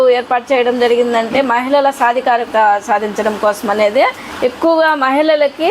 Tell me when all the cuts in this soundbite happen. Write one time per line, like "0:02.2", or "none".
0:02.5
0:04.2

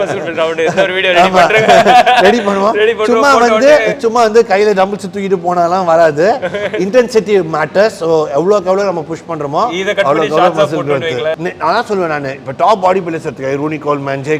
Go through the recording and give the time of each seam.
0:11.4

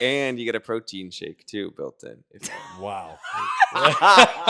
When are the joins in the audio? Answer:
none

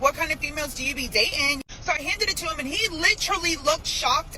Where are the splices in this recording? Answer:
none

